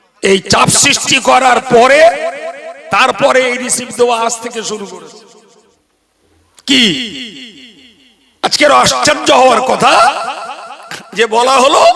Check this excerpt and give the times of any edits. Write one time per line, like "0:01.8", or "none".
0:05.8